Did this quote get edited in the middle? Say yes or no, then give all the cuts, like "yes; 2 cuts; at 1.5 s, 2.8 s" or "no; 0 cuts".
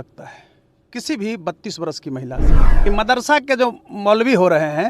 yes; 1 cut; at 2.7 s